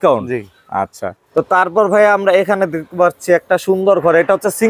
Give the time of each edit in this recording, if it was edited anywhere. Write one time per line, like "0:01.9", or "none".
none